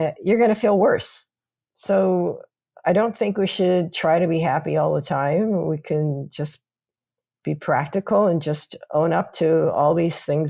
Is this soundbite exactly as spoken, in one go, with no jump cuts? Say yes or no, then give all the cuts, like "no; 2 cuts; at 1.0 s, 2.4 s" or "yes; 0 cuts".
yes; 0 cuts